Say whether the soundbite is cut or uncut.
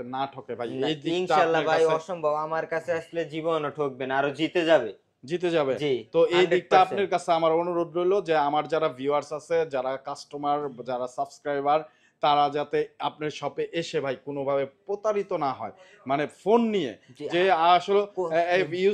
uncut